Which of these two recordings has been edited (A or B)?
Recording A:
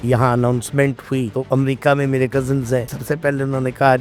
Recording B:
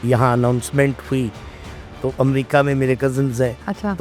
A